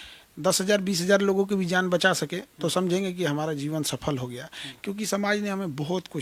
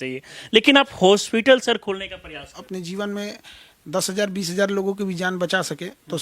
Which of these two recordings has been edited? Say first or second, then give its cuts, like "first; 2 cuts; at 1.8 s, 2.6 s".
second; 1 cut; at 2.6 s